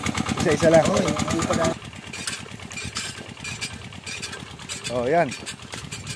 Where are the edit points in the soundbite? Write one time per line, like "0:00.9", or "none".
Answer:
0:01.7